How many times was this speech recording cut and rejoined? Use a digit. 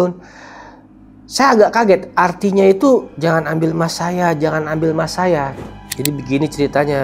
1